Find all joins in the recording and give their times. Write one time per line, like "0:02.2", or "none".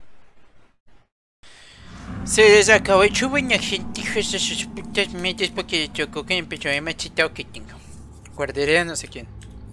0:01.4